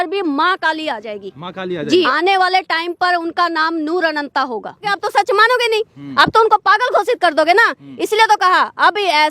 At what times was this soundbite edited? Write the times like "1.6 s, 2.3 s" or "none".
2.1 s, 5.0 s